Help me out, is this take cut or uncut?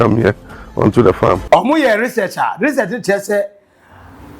cut